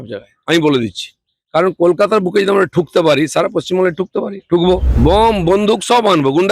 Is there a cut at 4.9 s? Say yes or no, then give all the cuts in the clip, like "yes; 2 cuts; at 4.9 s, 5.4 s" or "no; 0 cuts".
yes; 1 cut; at 4.9 s